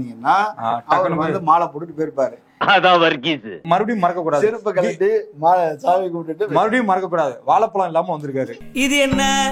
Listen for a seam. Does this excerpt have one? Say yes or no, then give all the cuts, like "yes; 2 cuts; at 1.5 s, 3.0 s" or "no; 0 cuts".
yes; 1 cut; at 3.6 s